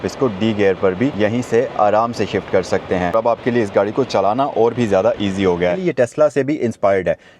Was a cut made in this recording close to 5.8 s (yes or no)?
yes